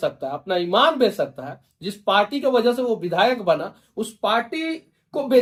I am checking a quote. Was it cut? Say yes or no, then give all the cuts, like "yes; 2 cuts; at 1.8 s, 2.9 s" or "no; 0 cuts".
no; 0 cuts